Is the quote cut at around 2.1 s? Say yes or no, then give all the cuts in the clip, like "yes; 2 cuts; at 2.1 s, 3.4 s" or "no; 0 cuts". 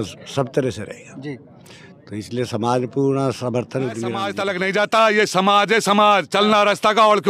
no; 1 cut; at 4.3 s